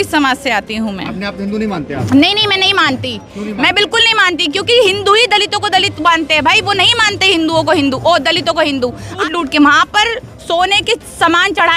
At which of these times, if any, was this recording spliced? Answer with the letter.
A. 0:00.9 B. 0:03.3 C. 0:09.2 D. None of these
C